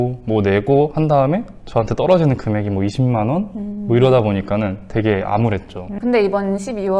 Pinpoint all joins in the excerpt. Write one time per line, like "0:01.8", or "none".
0:05.9